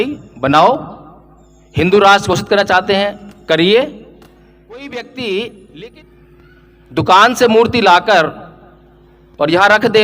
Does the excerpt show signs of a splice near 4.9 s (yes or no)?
yes